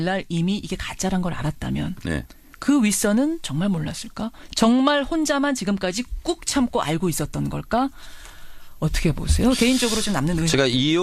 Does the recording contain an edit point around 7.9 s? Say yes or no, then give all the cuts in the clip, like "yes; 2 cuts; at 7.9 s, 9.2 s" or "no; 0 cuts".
no; 1 cut; at 4.4 s